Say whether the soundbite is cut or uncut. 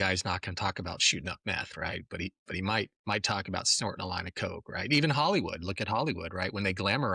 uncut